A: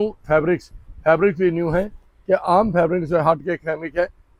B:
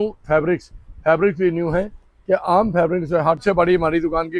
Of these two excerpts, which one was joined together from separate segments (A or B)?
B